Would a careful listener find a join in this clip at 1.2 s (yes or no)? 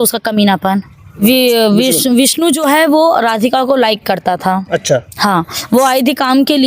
yes